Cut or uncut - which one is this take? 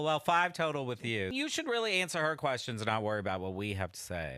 cut